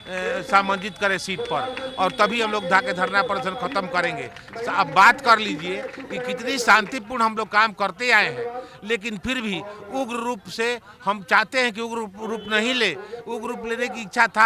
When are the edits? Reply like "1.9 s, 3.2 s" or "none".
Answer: none